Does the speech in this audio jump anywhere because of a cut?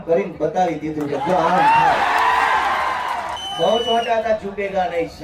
yes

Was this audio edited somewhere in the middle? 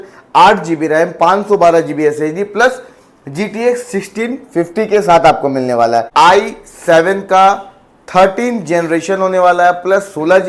yes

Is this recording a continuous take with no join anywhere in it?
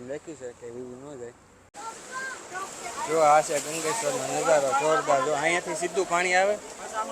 no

